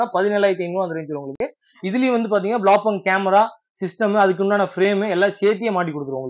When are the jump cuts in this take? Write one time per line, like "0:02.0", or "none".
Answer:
none